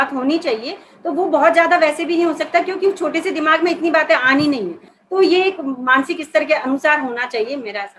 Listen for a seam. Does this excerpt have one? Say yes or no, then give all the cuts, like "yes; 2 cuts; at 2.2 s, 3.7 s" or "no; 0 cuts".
yes; 1 cut; at 4.9 s